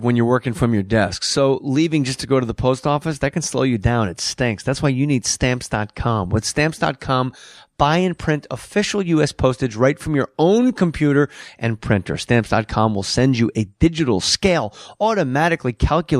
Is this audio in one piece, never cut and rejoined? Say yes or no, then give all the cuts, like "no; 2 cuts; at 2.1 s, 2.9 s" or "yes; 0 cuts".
no; 1 cut; at 5.3 s